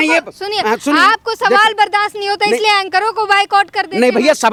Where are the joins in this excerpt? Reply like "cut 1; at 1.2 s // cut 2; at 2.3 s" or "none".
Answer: none